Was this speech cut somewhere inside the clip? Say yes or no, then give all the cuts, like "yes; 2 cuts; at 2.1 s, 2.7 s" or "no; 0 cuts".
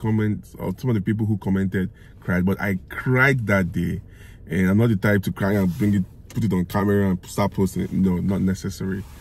no; 0 cuts